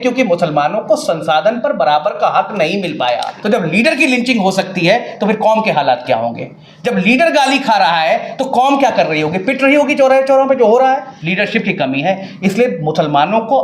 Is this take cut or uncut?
cut